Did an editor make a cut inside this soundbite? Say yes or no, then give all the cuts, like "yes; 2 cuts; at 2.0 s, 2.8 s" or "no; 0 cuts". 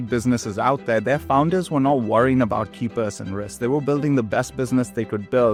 no; 0 cuts